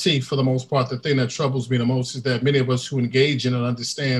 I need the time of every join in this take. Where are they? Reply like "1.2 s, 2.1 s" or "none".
none